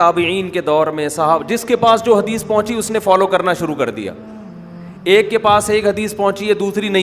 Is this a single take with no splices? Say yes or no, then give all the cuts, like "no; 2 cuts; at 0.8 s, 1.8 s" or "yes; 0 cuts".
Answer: yes; 0 cuts